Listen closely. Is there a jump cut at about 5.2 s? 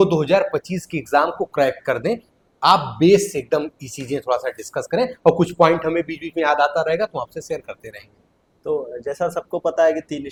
no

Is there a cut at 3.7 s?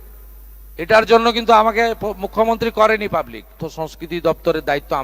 yes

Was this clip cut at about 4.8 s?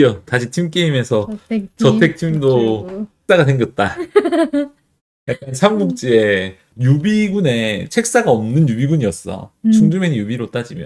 no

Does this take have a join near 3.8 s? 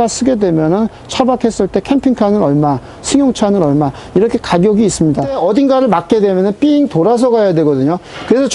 no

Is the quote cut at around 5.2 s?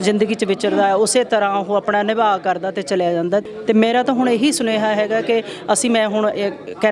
no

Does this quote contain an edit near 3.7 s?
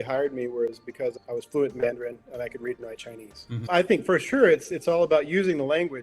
yes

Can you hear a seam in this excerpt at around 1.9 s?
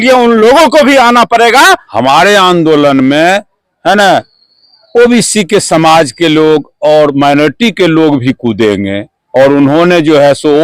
yes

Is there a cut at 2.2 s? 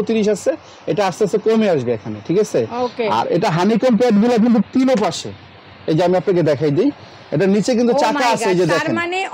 no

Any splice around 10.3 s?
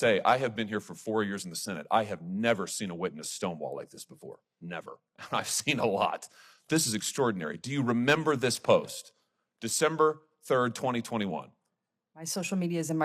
no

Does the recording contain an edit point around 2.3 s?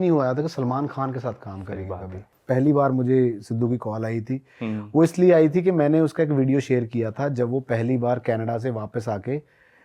yes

